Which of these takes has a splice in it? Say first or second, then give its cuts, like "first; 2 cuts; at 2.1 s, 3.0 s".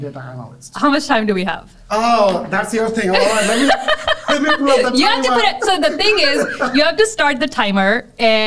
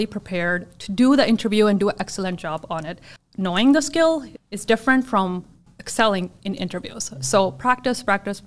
second; 3 cuts; at 3.0 s, 4.3 s, 5.7 s